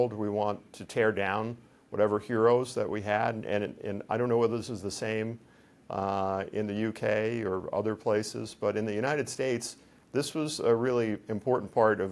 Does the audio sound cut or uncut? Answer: uncut